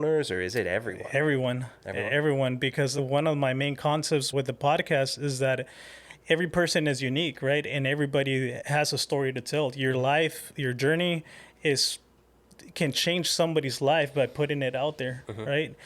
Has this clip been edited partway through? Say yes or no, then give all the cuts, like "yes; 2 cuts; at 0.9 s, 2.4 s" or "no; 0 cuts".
yes; 3 cuts; at 3.0 s, 4.3 s, 8.6 s